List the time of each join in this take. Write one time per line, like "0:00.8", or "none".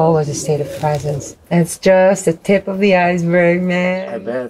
0:01.3